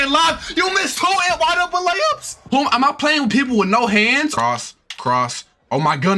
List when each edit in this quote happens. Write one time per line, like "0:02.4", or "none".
0:02.4
0:04.3